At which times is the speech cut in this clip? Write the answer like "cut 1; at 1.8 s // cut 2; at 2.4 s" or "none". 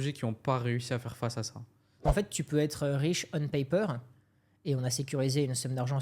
cut 1; at 2.0 s

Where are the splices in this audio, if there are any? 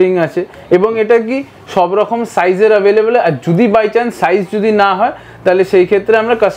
none

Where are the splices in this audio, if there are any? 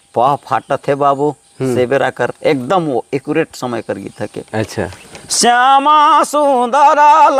none

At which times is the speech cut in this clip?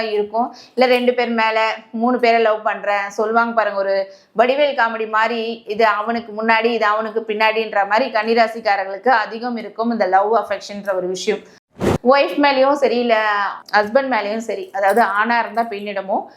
cut 1; at 11.7 s

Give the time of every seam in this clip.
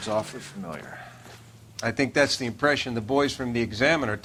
none

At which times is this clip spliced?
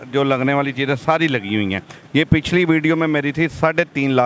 none

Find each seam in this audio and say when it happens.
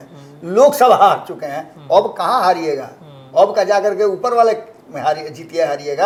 none

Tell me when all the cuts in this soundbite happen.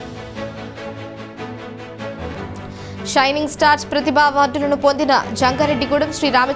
cut 1; at 1.0 s

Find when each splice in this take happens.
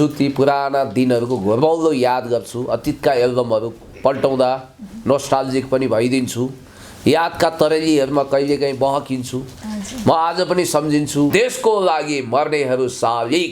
cut 1; at 11.3 s

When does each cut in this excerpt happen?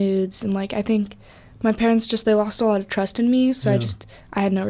none

